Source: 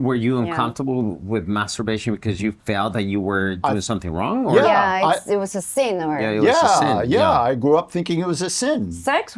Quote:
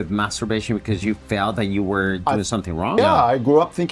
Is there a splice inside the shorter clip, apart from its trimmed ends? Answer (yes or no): yes